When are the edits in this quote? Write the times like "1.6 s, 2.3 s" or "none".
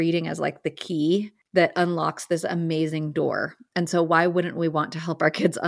1.4 s